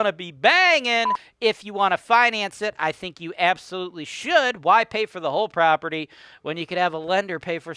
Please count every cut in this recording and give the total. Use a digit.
1